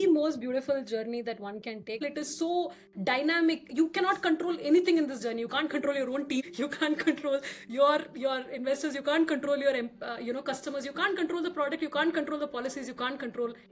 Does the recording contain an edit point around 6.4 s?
yes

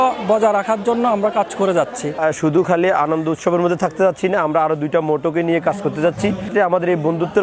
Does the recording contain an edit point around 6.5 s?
yes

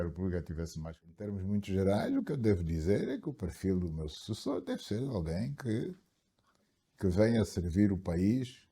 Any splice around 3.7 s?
no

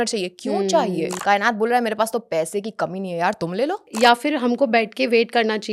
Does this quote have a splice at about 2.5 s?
no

